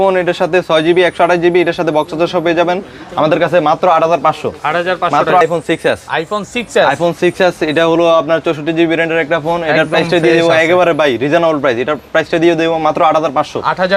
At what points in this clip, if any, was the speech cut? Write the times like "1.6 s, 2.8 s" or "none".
5.4 s